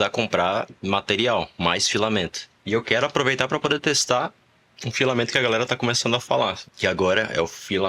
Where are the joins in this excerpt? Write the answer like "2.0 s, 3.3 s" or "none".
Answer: 2.6 s